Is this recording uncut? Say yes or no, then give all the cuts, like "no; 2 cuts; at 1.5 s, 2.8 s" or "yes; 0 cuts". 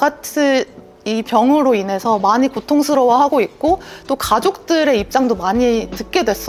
yes; 0 cuts